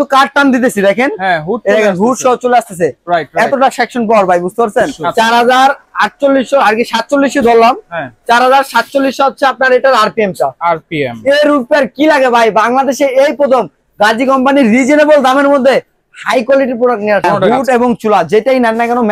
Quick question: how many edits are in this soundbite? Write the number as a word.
two